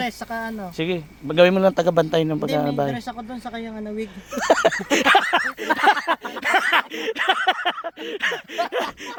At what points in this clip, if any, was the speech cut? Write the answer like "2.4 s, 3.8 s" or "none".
none